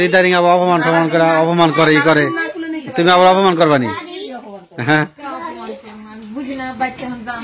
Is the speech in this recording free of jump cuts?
yes; 0 cuts

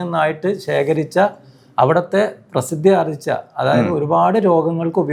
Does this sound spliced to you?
no; 0 cuts

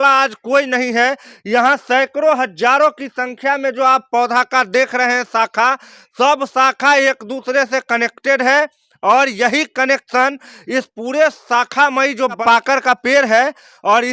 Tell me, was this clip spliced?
no; 0 cuts

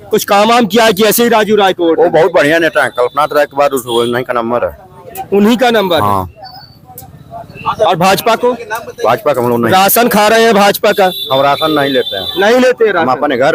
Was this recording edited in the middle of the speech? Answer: no; 0 cuts

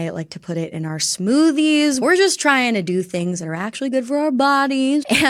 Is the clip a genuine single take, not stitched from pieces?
no; 1 cut; at 2.0 s

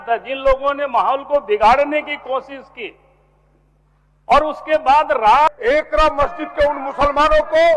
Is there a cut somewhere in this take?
yes; 1 cut; at 5.5 s

